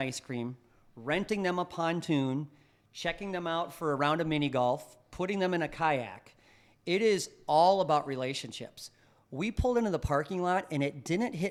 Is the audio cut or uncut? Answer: uncut